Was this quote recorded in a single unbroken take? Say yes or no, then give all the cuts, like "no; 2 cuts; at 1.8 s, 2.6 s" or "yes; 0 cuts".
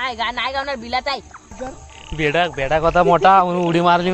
no; 1 cut; at 1.5 s